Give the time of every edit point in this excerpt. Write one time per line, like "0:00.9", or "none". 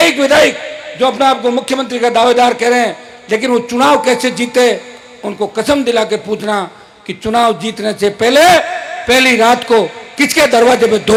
none